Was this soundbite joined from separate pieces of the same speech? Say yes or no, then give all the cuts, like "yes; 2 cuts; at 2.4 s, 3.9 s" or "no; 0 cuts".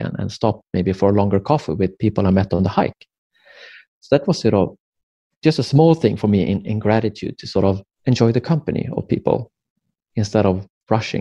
yes; 1 cut; at 7.9 s